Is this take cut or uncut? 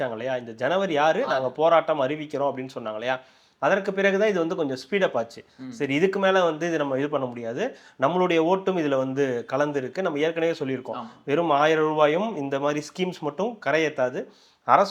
uncut